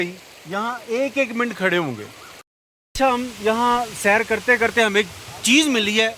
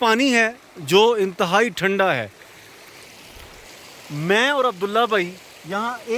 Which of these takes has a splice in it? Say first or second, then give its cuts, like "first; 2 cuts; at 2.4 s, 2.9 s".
first; 1 cut; at 2.4 s